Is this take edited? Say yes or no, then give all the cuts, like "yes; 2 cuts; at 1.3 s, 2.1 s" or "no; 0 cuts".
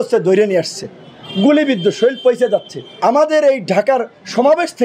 yes; 1 cut; at 2.8 s